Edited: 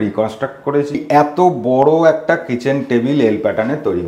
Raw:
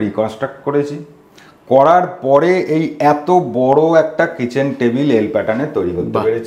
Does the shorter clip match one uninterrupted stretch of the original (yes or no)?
no